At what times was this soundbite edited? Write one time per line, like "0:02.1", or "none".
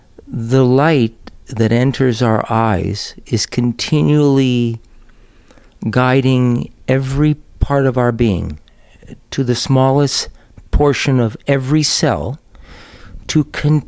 none